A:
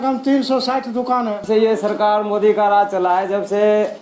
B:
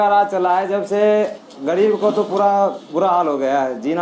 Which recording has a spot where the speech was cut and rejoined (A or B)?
A